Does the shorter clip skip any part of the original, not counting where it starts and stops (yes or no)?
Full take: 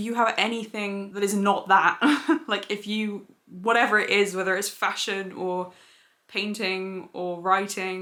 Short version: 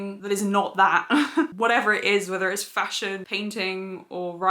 yes